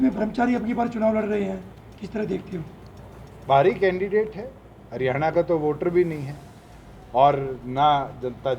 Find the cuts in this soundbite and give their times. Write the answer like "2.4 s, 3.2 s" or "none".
none